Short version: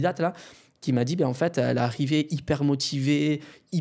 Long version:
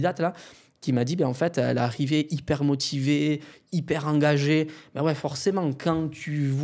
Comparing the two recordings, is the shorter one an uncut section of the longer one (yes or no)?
yes